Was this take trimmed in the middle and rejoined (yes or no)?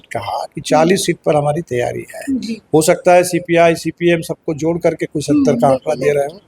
no